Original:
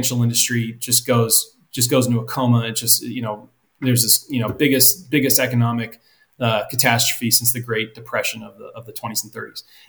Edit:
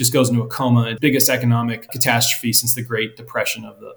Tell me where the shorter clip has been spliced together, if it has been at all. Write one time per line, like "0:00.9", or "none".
0:00.9
0:01.9